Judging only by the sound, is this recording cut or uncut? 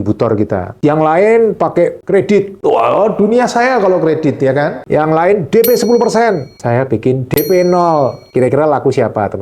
uncut